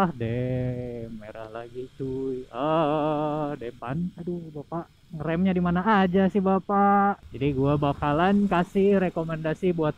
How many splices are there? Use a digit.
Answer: 2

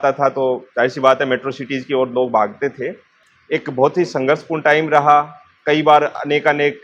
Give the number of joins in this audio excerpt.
1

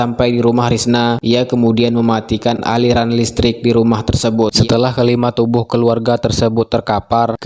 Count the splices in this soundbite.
1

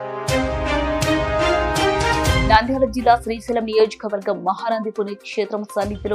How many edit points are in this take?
1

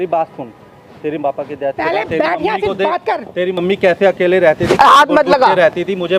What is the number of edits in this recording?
0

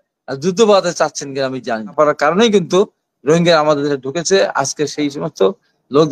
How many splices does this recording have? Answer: 1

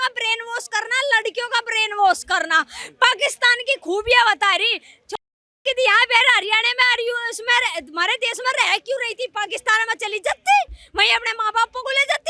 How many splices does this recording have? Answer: 0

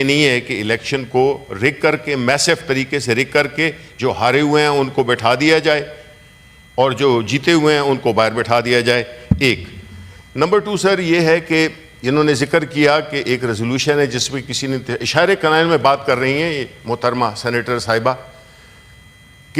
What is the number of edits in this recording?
0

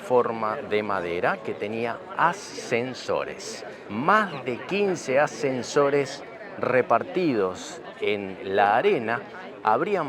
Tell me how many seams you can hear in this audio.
0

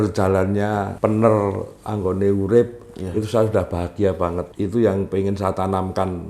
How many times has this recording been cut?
2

